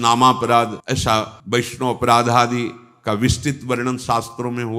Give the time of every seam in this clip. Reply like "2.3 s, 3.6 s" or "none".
0.9 s